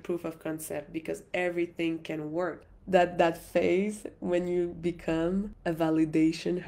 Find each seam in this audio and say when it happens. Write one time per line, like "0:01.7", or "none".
0:02.6
0:05.5